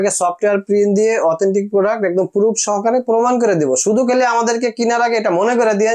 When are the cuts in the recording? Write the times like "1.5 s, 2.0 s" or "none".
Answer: none